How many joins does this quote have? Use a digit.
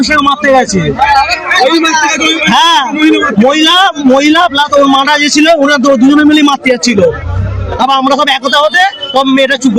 0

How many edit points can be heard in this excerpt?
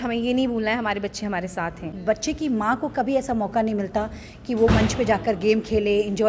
1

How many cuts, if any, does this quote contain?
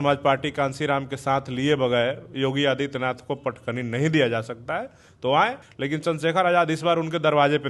1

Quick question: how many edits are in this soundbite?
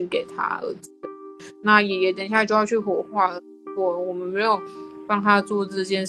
1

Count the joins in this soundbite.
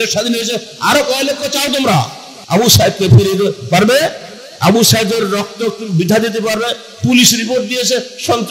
1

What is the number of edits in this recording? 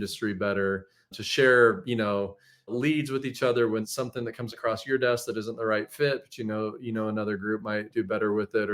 4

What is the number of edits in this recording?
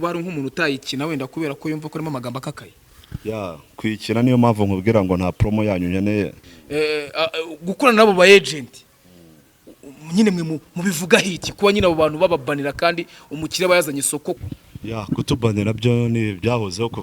2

